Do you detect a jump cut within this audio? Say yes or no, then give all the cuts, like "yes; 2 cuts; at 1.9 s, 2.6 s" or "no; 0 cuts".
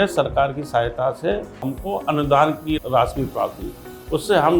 yes; 2 cuts; at 1.7 s, 2.8 s